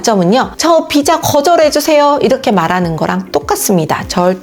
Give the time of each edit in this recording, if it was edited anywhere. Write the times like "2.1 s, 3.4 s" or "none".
none